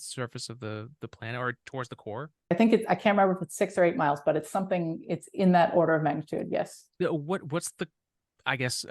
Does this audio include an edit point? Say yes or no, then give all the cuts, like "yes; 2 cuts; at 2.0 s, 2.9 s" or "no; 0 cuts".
yes; 1 cut; at 2.5 s